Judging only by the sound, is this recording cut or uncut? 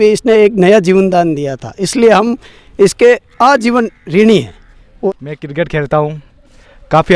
cut